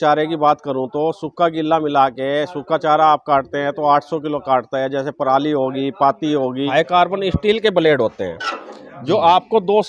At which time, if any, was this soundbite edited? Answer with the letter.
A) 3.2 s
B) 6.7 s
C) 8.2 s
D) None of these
B